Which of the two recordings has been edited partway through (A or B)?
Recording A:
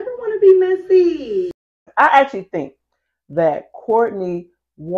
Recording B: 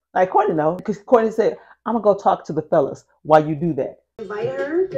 A